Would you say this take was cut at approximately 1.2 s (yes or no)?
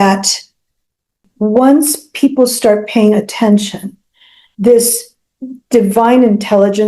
yes